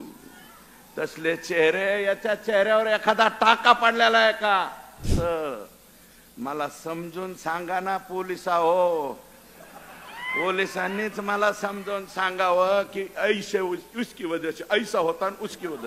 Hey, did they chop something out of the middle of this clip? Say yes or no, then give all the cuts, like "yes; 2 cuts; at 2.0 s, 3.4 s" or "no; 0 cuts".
yes; 1 cut; at 5.0 s